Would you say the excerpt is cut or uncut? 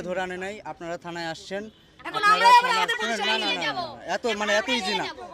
uncut